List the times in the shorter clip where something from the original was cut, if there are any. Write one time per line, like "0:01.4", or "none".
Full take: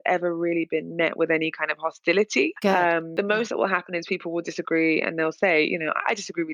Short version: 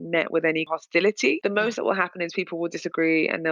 0:01.2